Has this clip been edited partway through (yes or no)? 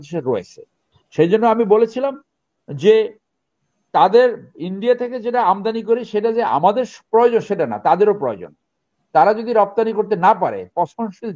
no